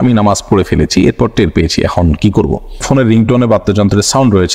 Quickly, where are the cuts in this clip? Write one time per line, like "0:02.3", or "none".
0:02.8

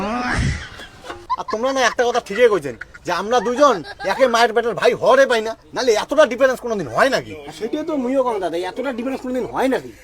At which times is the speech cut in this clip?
0:01.2

